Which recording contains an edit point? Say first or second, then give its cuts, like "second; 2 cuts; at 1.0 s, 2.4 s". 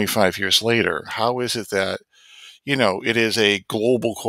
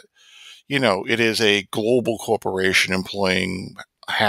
first; 1 cut; at 1.1 s